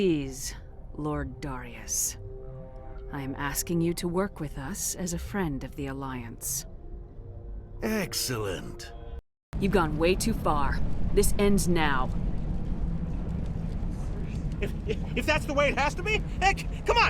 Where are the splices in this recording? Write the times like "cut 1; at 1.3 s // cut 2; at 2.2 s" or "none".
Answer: cut 1; at 9.2 s